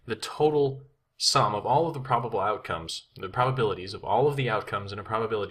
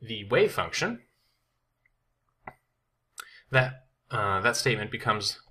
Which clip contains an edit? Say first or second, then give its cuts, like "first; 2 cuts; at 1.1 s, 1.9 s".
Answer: second; 1 cut; at 4.2 s